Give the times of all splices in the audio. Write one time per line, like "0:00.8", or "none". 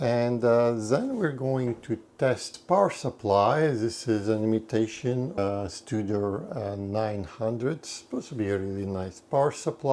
0:02.5
0:05.4